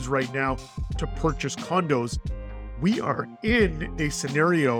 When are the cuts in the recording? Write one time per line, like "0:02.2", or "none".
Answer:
none

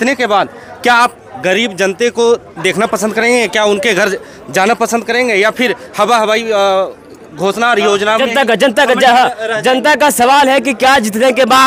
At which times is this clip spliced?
none

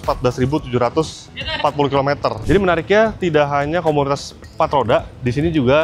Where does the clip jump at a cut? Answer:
0:02.4

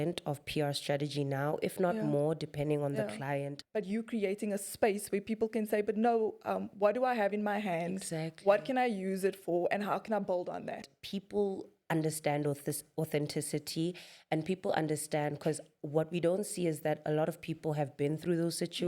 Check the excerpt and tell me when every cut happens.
0:03.6
0:10.9

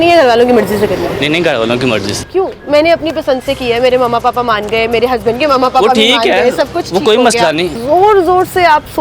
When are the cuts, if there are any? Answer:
0:01.1
0:02.2
0:07.7

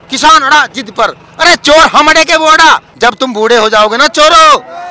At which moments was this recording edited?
0:02.9

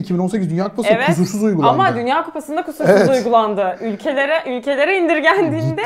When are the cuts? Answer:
none

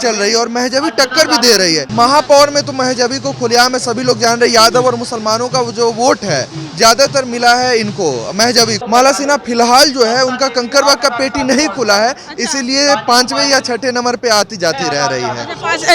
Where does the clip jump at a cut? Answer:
0:01.9
0:08.8

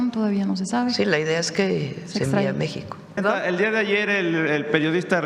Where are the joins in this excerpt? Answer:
0:03.2

